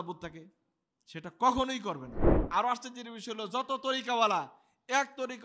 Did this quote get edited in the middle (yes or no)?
yes